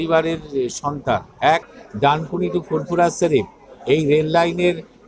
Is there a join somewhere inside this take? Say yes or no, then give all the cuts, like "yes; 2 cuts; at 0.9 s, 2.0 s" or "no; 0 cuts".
yes; 1 cut; at 1.8 s